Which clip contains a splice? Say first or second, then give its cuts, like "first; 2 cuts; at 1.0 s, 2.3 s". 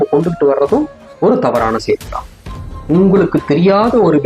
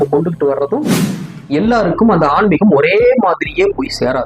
second; 1 cut; at 1.0 s